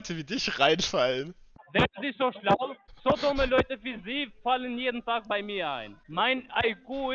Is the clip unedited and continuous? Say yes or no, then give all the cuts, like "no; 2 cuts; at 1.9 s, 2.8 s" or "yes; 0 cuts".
no; 2 cuts; at 2.9 s, 5.9 s